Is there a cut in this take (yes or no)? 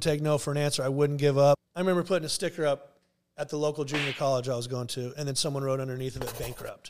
yes